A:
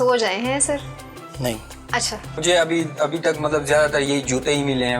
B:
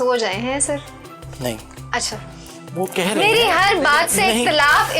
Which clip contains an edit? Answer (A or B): A